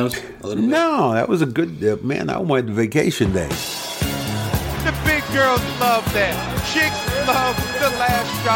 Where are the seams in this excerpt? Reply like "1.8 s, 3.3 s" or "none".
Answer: 3.6 s